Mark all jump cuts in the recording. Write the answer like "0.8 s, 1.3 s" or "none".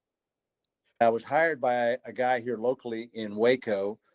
1.0 s